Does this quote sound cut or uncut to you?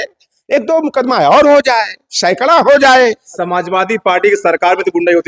cut